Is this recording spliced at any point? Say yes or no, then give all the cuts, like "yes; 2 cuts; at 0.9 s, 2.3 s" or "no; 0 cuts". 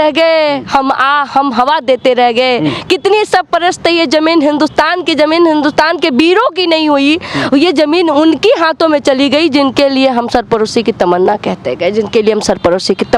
no; 0 cuts